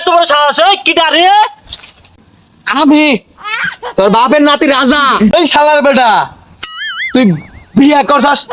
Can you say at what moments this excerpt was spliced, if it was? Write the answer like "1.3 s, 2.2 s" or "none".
5.3 s